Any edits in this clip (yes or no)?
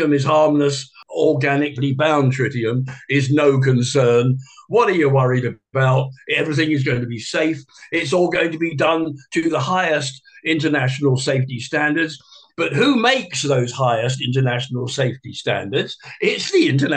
no